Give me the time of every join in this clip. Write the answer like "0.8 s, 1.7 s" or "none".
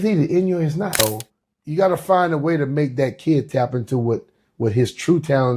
1.0 s